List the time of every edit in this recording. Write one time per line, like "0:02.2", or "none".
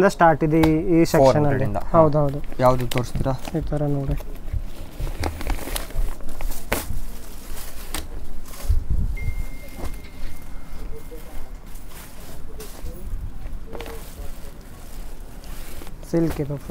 none